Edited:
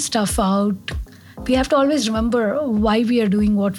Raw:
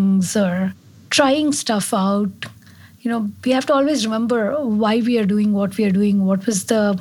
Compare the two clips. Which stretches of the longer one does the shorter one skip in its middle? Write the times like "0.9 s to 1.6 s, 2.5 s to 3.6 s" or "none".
2.9 s to 3.3 s